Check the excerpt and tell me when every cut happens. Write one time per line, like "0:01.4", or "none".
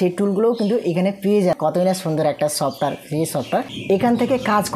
0:01.6
0:03.7